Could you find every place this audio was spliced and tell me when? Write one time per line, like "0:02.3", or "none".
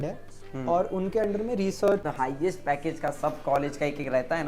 0:02.0